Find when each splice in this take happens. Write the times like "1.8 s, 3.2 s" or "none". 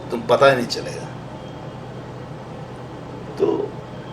none